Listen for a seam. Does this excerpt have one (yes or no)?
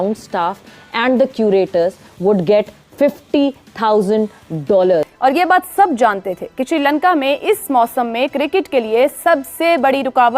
yes